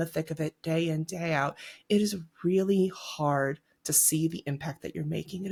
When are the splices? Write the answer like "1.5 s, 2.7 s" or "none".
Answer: none